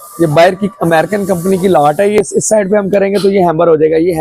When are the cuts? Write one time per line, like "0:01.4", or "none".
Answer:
0:02.2